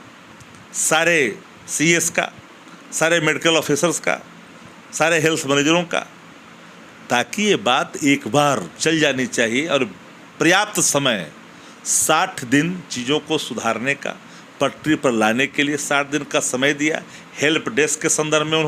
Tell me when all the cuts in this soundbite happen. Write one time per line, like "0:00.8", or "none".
none

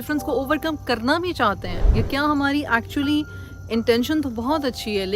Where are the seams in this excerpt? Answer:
none

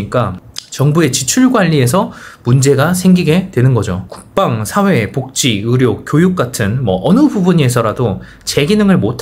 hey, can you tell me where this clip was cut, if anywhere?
none

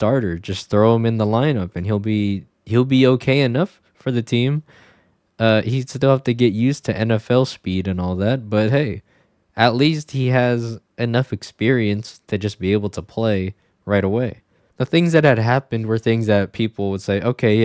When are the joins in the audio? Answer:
0:14.7

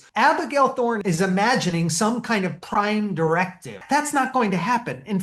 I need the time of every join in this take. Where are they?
0:01.0
0:03.8

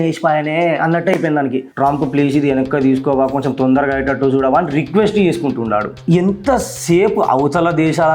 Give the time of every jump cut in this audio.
0:01.7
0:05.9

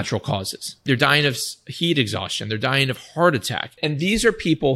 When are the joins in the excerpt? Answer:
0:00.9
0:03.8

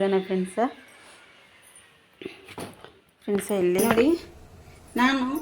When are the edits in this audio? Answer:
0:03.9

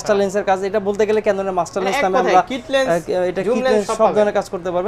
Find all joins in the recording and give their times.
none

